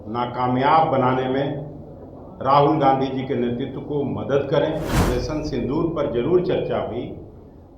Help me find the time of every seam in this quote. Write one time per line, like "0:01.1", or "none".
0:05.0